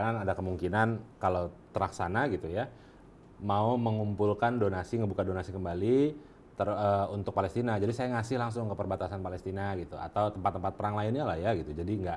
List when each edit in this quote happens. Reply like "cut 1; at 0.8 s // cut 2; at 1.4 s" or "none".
cut 1; at 1.1 s